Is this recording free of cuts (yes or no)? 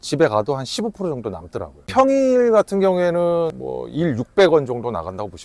no